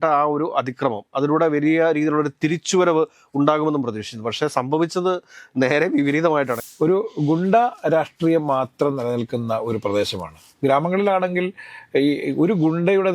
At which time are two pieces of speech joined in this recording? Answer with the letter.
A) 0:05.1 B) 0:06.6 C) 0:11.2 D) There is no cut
B